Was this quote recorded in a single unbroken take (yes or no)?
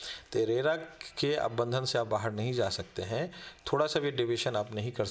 yes